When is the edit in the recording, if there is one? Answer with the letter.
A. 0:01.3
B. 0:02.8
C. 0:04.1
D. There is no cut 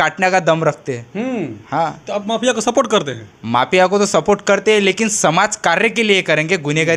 D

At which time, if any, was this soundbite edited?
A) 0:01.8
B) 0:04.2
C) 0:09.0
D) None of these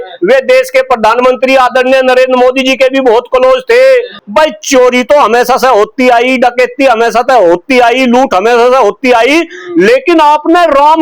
B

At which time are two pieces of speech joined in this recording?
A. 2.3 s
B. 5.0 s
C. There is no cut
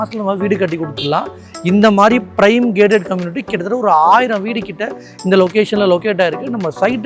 C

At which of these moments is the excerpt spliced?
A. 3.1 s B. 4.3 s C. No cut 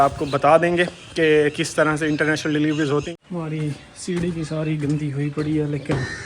A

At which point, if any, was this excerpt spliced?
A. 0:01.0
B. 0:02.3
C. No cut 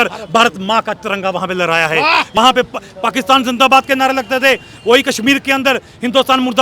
B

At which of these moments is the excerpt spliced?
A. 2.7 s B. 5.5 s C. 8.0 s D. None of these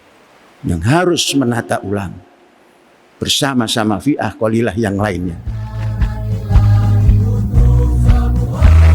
B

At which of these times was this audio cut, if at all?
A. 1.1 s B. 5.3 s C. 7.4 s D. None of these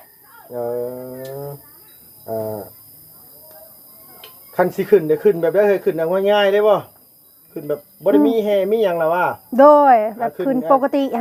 D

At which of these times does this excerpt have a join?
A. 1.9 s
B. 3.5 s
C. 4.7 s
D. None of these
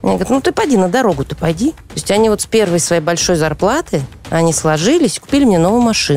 A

